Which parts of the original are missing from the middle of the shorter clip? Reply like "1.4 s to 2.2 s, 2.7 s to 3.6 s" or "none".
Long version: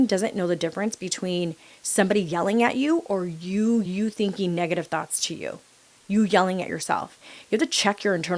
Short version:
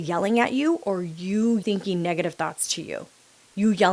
3.8 s to 4.1 s